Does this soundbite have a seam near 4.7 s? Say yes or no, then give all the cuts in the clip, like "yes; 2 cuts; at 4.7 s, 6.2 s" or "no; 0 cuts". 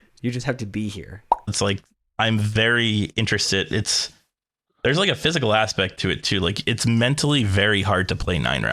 no; 1 cut; at 1.4 s